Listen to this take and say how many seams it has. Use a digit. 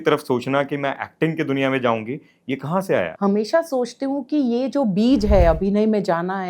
1